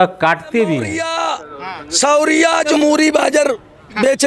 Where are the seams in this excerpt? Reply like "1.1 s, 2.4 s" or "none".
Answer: 1.1 s, 2.8 s

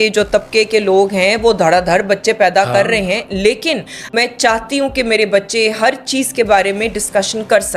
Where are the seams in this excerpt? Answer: 4.0 s

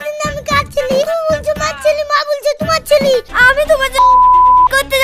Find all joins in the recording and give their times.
3.3 s

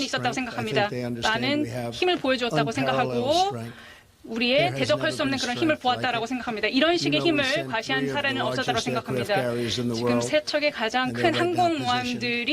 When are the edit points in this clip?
5.2 s

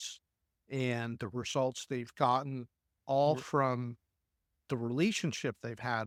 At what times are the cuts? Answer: none

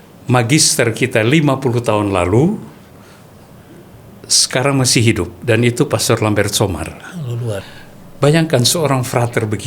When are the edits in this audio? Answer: 7.6 s

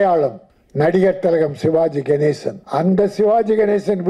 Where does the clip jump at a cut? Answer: 2.6 s

